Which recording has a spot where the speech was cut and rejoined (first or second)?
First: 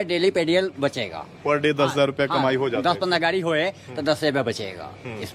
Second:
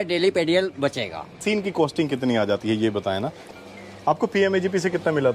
second